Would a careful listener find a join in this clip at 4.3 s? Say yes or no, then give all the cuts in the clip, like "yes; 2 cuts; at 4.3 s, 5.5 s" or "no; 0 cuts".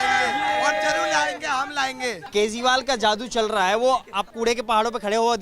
yes; 2 cuts; at 2.2 s, 4.3 s